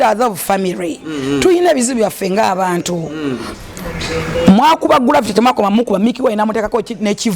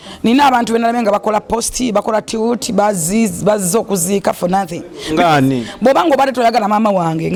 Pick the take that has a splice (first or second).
first